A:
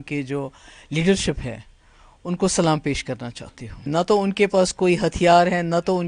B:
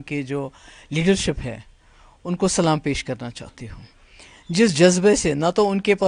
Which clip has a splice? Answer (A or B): A